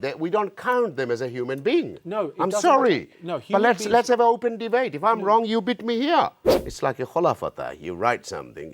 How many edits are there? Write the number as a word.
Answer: one